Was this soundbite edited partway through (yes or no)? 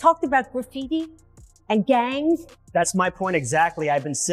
yes